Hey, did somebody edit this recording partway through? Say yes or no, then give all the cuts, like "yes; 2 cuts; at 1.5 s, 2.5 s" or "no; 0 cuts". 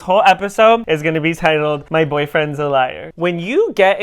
yes; 3 cuts; at 0.8 s, 1.8 s, 3.1 s